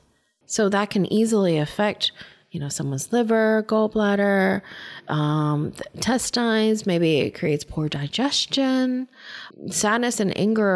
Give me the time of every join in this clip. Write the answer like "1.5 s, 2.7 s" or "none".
none